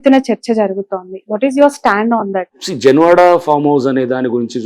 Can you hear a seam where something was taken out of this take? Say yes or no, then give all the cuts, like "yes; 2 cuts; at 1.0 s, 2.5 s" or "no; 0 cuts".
yes; 1 cut; at 2.5 s